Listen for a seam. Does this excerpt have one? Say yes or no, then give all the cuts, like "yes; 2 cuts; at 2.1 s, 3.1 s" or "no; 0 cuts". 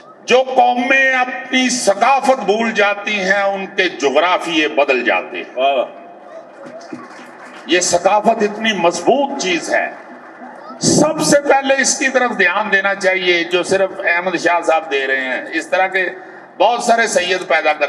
no; 0 cuts